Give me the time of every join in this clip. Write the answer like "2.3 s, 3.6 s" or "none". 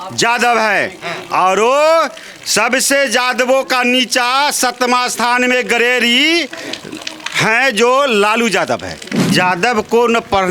9.3 s